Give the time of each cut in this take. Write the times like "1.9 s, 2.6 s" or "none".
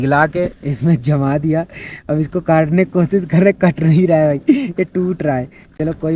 none